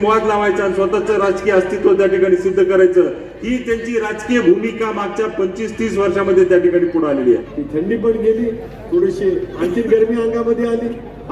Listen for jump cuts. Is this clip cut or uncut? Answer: cut